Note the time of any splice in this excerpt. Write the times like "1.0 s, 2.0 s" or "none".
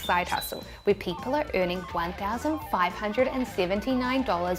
none